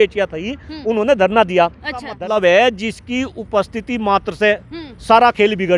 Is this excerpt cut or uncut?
cut